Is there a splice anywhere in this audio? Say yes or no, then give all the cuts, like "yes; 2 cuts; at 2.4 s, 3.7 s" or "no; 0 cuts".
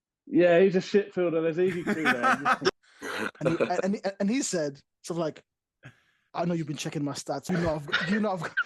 yes; 2 cuts; at 2.7 s, 7.5 s